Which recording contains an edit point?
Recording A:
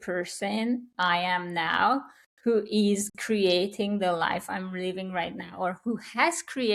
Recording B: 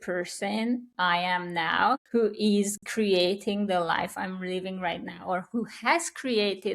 B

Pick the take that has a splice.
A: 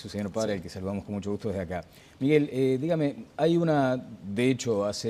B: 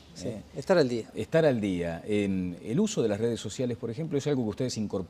A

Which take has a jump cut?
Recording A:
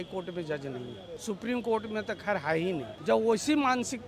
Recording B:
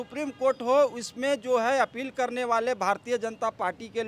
A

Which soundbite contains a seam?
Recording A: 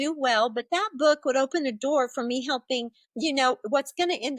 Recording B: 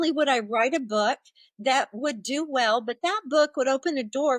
A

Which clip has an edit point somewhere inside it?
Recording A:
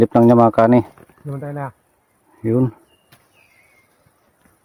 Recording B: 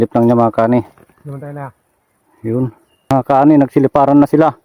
B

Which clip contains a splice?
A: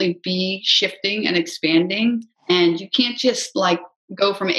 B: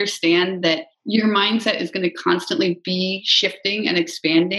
B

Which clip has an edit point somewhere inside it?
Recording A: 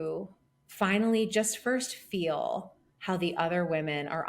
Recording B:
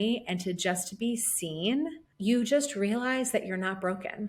B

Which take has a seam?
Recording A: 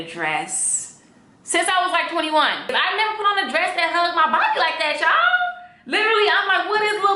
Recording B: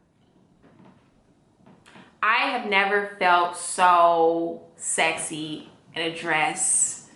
A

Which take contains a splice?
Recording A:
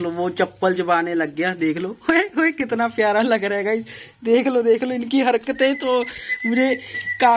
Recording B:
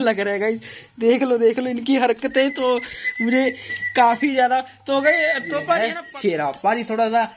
B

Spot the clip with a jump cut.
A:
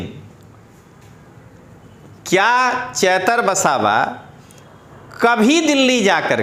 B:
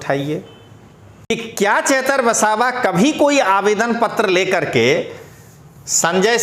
B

